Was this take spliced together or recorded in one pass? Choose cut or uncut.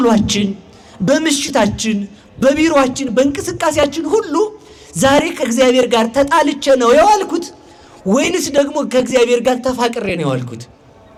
uncut